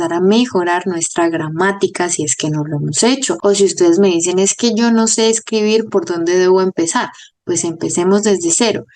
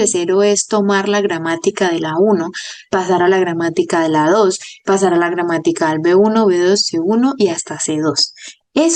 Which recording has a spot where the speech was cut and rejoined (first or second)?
first